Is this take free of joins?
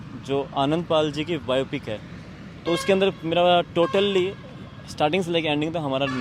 yes; 0 cuts

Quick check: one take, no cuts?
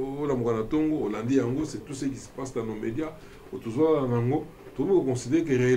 yes; 0 cuts

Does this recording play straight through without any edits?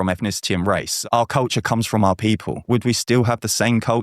no; 2 cuts; at 0.9 s, 2.7 s

